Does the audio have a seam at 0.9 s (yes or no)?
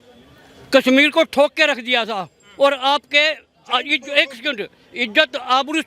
no